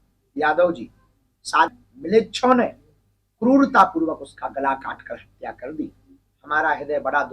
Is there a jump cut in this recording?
yes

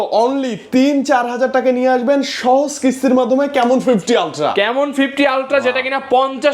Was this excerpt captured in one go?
yes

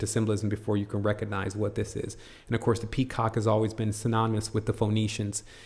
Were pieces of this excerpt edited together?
yes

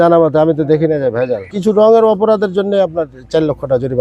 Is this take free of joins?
no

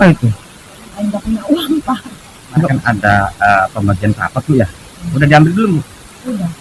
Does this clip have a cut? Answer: yes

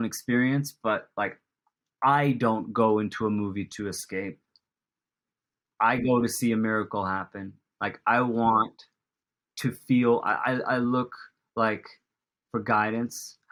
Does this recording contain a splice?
no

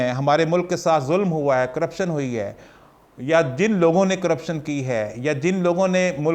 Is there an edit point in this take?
no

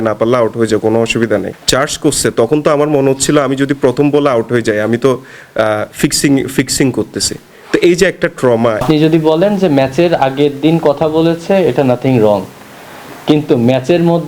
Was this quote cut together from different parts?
yes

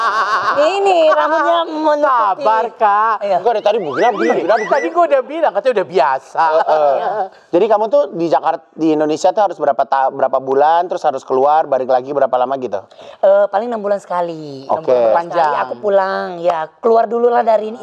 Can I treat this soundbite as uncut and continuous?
yes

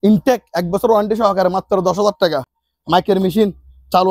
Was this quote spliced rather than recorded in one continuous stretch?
no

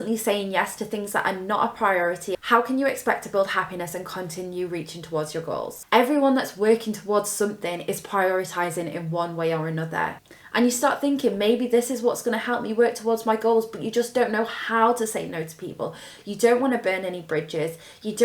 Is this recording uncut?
no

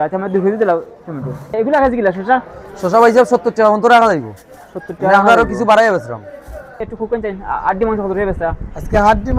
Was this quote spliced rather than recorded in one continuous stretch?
yes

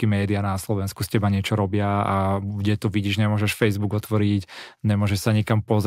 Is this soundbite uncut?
yes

